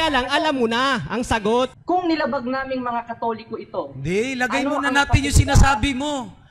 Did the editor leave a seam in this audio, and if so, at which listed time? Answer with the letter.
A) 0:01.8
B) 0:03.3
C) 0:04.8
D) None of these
A